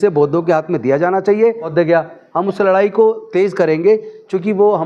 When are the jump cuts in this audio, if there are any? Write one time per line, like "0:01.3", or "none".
0:01.6